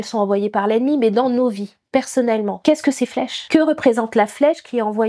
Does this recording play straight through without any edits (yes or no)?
yes